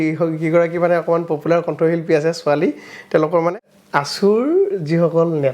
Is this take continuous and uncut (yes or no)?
no